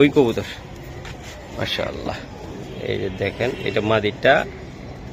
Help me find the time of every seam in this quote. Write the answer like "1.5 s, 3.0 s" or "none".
none